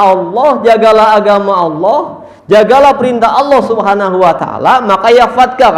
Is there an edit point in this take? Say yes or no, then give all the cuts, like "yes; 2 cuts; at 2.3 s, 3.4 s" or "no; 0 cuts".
no; 0 cuts